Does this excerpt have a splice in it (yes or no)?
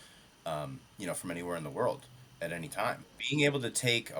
yes